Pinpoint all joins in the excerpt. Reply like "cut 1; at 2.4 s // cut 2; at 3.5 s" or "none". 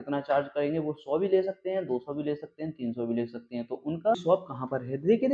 cut 1; at 4.2 s